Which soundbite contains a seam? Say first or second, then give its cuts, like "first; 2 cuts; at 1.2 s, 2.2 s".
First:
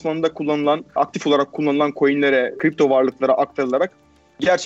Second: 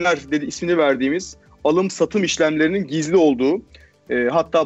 first; 2 cuts; at 0.9 s, 2.6 s